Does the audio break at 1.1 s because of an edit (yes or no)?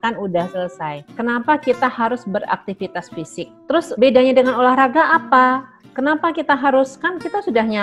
yes